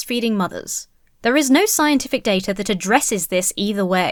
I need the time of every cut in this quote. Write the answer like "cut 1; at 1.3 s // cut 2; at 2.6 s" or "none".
none